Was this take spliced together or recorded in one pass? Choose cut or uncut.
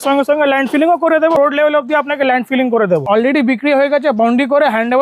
cut